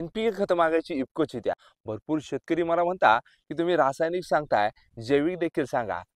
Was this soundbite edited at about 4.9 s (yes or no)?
no